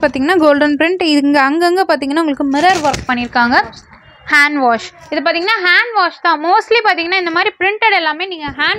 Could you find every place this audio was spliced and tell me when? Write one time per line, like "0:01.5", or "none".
none